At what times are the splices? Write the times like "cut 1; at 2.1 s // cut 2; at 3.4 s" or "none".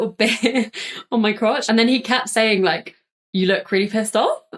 cut 1; at 1.6 s